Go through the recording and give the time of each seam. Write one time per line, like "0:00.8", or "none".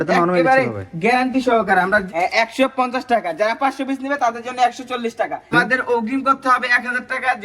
0:02.1
0:05.5